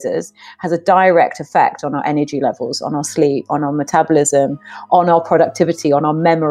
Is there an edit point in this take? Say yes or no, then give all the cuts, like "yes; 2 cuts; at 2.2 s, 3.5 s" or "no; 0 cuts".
no; 0 cuts